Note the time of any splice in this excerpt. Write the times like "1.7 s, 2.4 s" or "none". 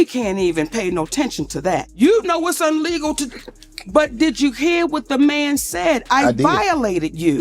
1.9 s